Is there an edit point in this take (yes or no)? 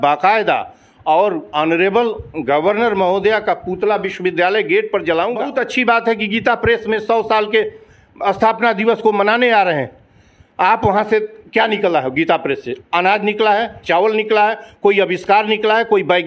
yes